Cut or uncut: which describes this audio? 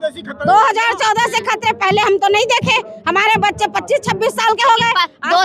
uncut